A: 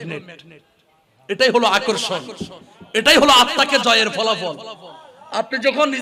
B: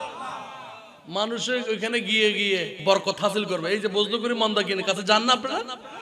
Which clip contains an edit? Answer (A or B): B